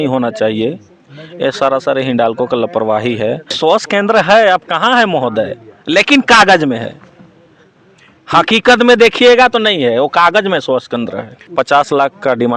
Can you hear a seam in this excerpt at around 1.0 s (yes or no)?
no